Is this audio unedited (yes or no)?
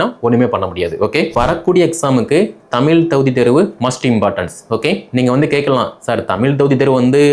no